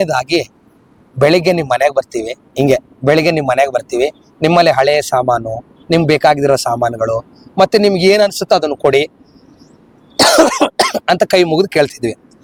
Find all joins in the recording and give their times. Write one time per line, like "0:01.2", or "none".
none